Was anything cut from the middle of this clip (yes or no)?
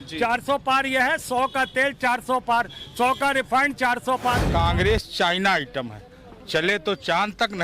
yes